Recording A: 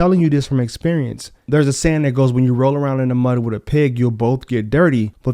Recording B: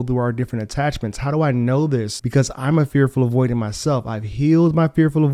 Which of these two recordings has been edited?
A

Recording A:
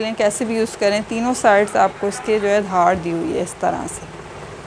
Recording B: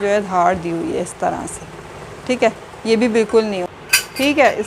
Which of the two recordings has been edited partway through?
B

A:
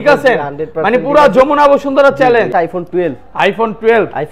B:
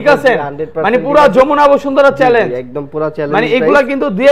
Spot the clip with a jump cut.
A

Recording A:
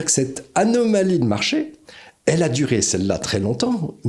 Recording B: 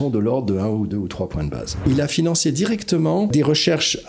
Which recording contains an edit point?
B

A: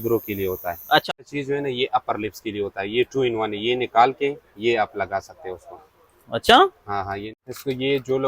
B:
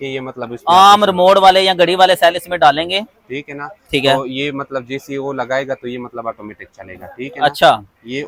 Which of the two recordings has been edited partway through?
A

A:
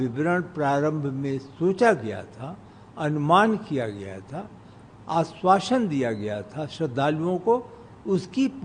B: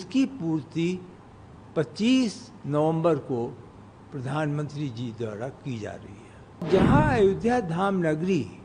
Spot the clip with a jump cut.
B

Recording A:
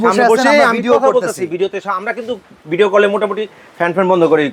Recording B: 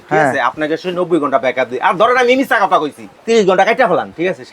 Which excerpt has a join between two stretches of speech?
B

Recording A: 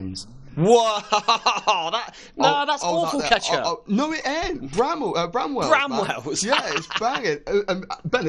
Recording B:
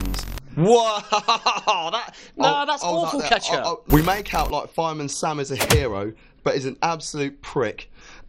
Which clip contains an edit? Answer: B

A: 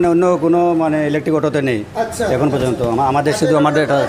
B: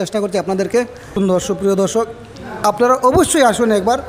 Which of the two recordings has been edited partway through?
B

